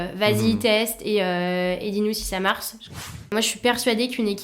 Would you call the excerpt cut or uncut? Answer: cut